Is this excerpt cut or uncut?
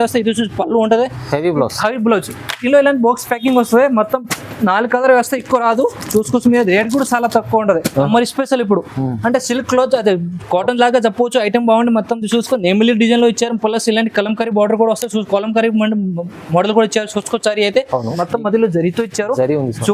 cut